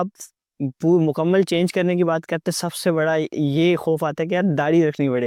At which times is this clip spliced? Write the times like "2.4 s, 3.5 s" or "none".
none